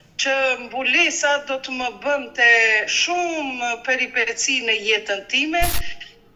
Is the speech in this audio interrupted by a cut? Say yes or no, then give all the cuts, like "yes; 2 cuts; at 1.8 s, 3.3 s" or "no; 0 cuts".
no; 0 cuts